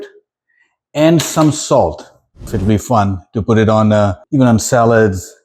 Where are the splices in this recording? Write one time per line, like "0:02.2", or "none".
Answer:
0:02.5
0:04.2